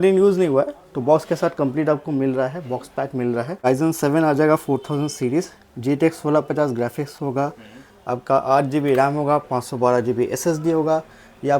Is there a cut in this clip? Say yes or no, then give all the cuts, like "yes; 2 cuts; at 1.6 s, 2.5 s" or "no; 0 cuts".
yes; 1 cut; at 3.7 s